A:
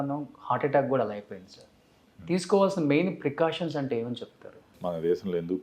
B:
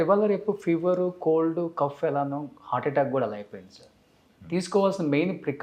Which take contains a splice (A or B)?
A